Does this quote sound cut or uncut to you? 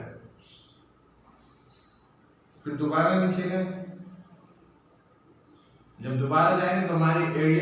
uncut